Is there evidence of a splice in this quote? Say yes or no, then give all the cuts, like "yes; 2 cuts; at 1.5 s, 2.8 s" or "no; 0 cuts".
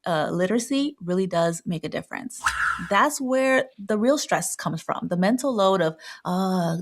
yes; 1 cut; at 2.7 s